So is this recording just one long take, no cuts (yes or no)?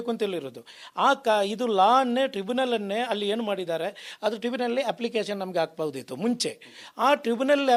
yes